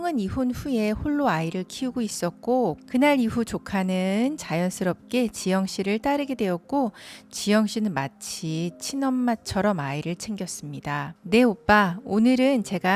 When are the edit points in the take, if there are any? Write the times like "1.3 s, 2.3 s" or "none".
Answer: 2.8 s, 11.1 s